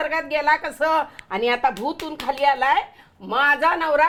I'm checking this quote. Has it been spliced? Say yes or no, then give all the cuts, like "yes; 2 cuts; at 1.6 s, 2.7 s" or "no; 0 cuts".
no; 0 cuts